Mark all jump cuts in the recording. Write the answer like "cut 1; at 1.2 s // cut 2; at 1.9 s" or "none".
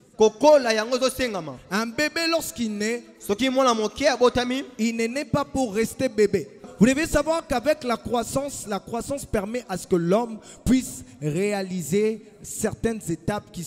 cut 1; at 6.7 s